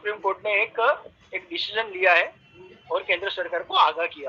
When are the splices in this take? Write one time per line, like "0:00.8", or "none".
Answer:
none